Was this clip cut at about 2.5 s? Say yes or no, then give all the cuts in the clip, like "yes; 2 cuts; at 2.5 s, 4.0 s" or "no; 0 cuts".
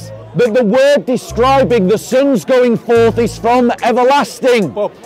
no; 0 cuts